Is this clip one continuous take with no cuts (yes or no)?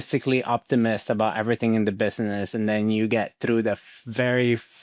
yes